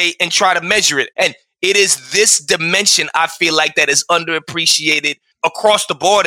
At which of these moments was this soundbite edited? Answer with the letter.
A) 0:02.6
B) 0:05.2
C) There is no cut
B